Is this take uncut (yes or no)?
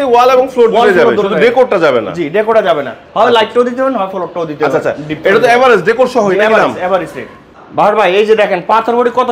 yes